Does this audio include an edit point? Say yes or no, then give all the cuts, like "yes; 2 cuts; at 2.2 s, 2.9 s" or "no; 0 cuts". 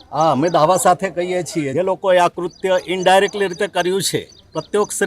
yes; 1 cut; at 1.7 s